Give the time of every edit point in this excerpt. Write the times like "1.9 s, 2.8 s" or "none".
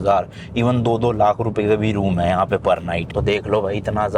none